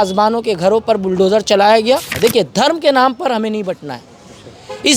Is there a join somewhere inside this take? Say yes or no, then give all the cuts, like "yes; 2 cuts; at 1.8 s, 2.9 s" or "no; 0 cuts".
yes; 1 cut; at 2.1 s